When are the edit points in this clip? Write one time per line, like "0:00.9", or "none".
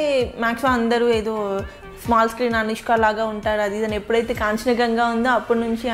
none